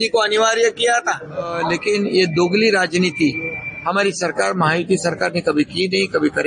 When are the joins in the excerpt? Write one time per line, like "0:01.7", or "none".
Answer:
0:01.7